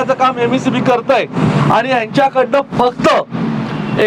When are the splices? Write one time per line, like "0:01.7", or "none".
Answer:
none